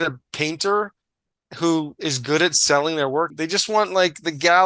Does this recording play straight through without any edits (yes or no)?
no